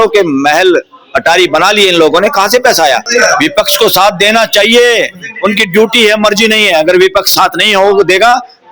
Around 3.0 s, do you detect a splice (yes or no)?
yes